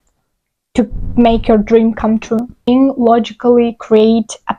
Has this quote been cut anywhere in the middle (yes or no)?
yes